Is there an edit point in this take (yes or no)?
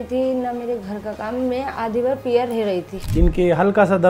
yes